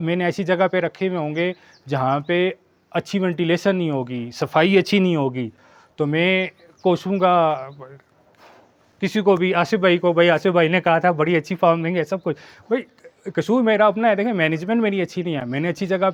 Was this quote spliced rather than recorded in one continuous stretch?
no; 0 cuts

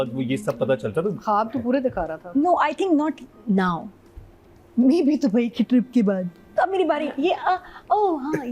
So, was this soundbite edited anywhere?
yes; 1 cut; at 6.5 s

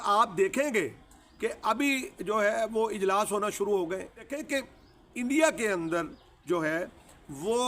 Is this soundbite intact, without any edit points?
no; 1 cut; at 4.4 s

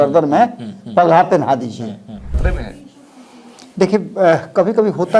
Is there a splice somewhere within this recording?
yes; 1 cut; at 2.4 s

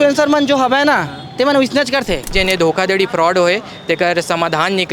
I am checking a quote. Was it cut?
yes; 1 cut; at 2.3 s

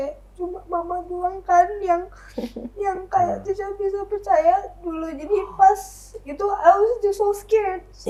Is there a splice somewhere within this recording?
no; 0 cuts

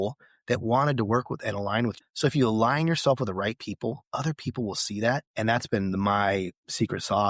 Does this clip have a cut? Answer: yes; 2 cuts; at 2.1 s, 5.3 s

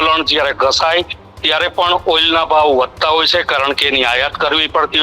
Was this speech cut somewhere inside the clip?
no; 0 cuts

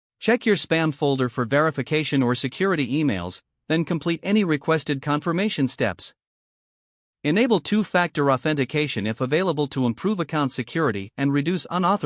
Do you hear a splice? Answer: no; 0 cuts

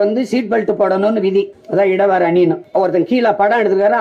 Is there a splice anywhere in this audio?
yes; 2 cuts; at 1.6 s, 2.6 s

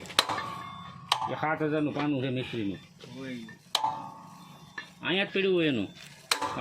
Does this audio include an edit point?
no; 0 cuts

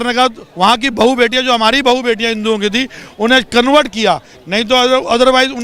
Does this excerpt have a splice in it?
no; 0 cuts

